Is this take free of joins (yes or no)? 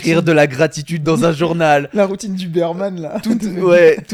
yes